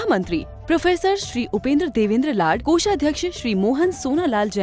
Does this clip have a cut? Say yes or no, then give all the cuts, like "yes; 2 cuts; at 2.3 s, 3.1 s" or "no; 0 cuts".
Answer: no; 0 cuts